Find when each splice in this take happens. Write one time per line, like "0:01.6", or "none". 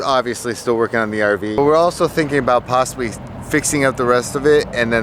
0:01.6